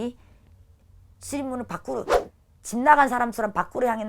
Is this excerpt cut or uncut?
uncut